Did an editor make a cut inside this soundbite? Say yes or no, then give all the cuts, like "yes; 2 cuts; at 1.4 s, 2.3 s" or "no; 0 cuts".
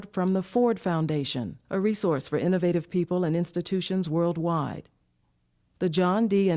no; 0 cuts